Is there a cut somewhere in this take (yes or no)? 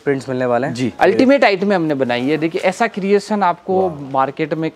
yes